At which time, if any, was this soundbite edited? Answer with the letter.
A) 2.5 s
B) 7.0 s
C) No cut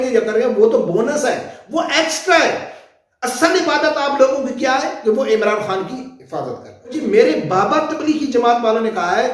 B